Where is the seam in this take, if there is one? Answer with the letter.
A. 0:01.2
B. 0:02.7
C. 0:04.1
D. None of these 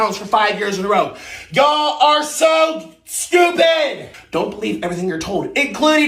C